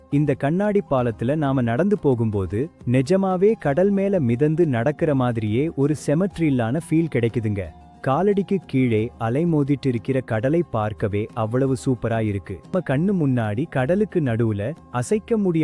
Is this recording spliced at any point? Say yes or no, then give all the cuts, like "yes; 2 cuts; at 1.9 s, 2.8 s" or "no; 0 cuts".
yes; 1 cut; at 12.7 s